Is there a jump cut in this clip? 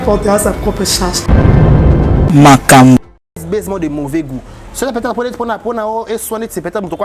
yes; 1 cut; at 3.4 s

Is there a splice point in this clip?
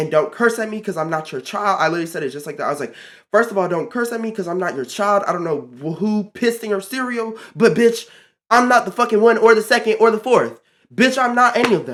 no; 0 cuts

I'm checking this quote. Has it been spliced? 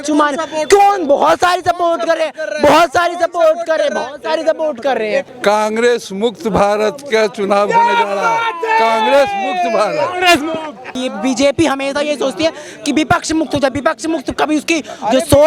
yes; 2 cuts; at 5.3 s, 10.9 s

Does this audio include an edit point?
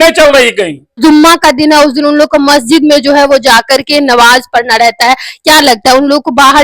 yes; 1 cut; at 1.0 s

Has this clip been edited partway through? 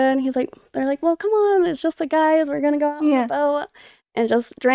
no; 0 cuts

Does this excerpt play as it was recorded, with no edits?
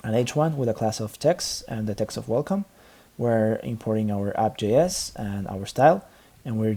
yes; 0 cuts

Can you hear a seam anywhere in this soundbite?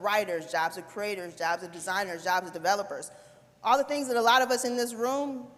no; 0 cuts

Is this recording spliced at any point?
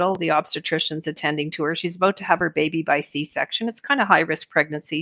no; 0 cuts

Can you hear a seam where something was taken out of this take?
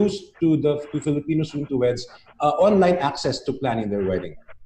no; 0 cuts

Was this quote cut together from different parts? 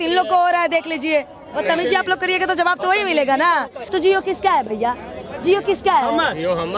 yes; 2 cuts; at 1.6 s, 3.8 s

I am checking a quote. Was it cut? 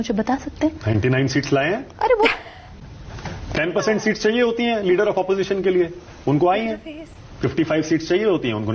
yes; 1 cut; at 2.4 s

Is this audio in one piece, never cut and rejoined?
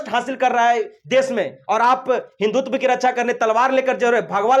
yes; 0 cuts

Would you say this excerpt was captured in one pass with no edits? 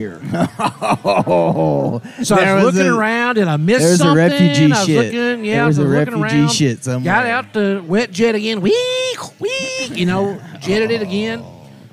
yes; 0 cuts

